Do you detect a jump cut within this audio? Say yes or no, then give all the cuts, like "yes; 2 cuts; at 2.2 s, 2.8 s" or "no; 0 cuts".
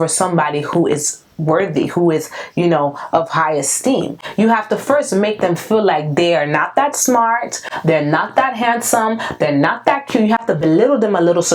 no; 0 cuts